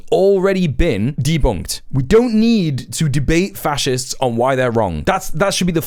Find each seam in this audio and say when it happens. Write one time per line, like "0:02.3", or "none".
none